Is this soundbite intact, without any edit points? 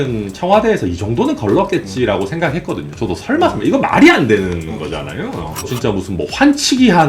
no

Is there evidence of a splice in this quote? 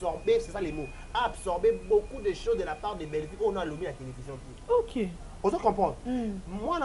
no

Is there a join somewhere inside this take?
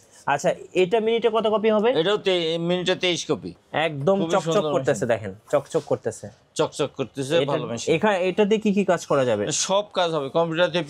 yes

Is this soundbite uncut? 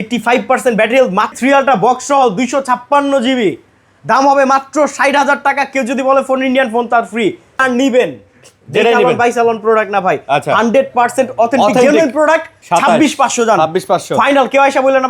no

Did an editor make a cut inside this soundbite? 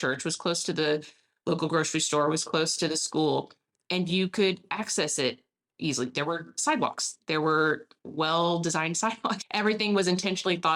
no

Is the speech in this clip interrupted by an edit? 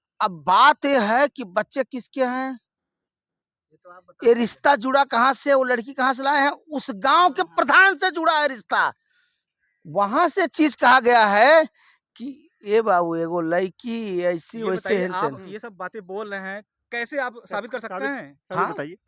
no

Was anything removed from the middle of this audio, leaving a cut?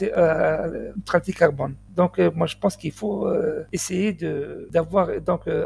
yes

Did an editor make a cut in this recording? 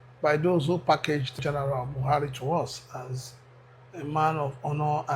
yes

